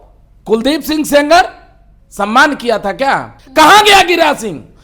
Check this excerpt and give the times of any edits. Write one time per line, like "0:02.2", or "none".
0:03.3